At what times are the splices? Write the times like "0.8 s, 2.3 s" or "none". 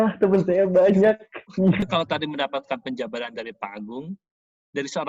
1.8 s